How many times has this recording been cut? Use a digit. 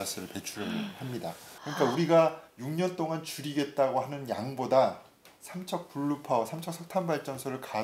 1